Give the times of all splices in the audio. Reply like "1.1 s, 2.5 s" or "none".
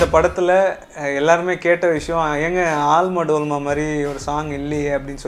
none